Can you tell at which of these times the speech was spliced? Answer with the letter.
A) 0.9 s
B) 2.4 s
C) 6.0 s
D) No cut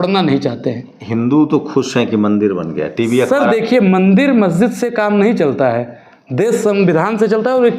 A